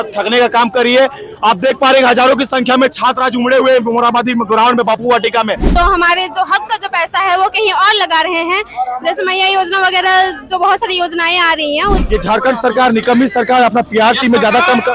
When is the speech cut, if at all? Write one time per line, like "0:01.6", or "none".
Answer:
0:05.7
0:12.0